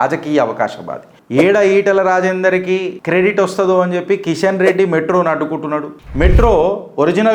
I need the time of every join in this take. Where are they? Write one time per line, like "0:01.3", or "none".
0:01.2
0:06.0